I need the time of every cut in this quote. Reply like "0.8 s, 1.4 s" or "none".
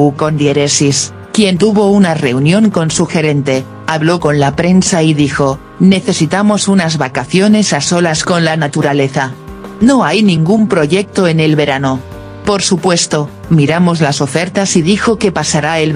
1.2 s